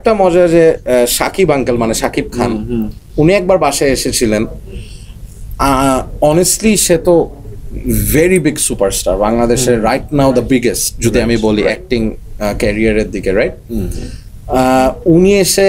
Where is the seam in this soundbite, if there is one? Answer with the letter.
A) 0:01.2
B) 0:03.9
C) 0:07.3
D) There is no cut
D